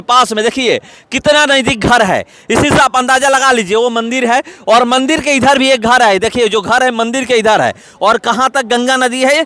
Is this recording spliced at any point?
no; 0 cuts

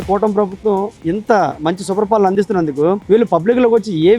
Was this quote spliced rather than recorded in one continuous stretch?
yes; 1 cut; at 2.3 s

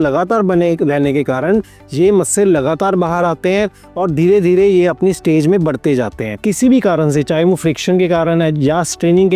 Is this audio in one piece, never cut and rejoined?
no; 1 cut; at 6.2 s

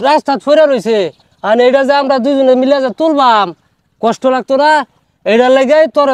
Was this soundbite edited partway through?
yes; 1 cut; at 4.9 s

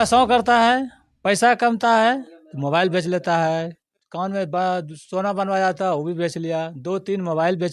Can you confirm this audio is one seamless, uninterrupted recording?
yes; 0 cuts

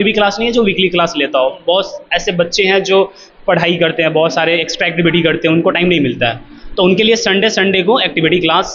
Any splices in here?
no; 0 cuts

